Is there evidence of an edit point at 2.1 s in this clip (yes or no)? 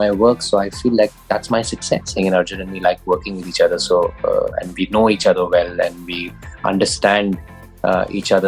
yes